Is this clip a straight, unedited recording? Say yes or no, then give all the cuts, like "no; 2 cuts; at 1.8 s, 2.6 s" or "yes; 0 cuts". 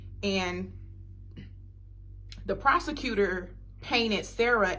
yes; 0 cuts